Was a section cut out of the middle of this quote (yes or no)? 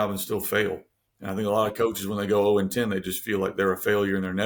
no